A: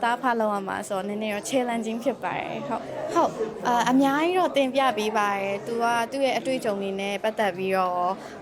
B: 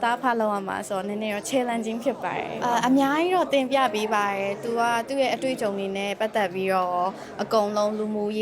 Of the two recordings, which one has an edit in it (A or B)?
B